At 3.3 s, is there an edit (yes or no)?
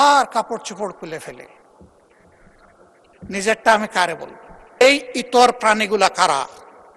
no